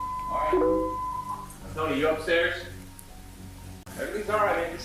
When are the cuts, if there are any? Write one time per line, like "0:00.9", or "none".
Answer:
0:03.9

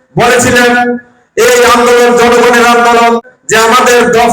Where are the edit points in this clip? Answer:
0:03.3

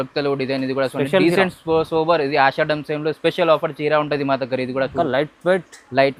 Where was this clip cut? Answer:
none

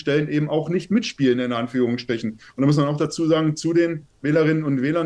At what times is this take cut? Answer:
0:02.4

